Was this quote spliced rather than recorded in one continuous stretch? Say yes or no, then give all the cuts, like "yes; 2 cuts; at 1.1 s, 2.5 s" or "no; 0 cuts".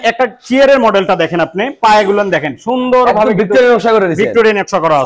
no; 0 cuts